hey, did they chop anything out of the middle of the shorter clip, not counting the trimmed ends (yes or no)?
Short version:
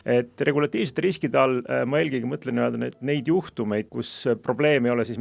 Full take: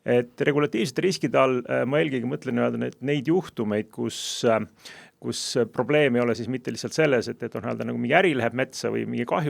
yes